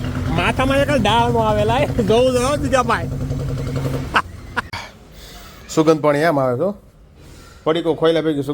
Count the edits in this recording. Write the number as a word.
one